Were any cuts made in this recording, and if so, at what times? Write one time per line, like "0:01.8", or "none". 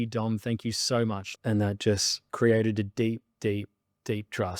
0:01.3
0:02.2